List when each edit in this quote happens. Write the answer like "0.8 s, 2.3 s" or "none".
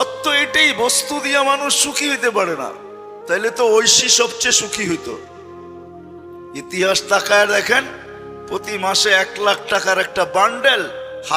5.2 s, 6.6 s